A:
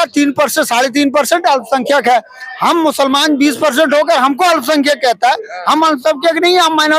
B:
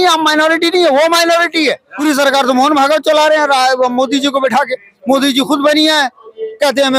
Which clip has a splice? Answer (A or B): B